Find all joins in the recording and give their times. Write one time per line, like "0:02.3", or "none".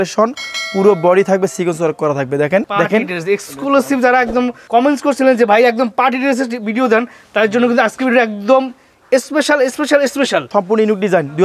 0:02.6
0:04.6
0:10.5